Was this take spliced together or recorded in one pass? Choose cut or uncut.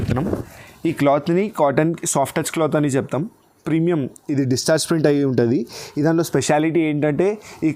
uncut